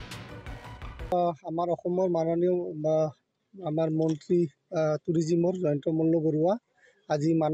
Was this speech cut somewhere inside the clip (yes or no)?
yes